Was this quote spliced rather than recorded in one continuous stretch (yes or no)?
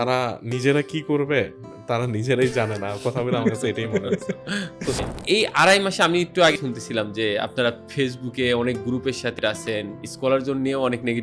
yes